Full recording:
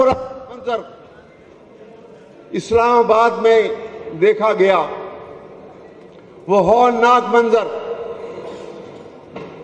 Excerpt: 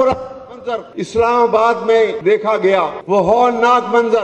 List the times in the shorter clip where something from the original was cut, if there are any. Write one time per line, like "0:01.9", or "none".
0:00.9
0:02.2
0:03.0